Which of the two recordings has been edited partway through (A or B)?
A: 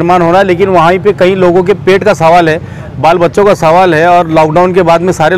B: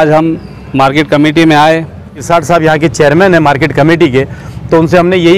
B